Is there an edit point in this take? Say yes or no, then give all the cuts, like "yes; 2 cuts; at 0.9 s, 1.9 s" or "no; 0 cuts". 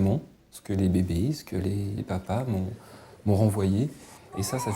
yes; 1 cut; at 2.0 s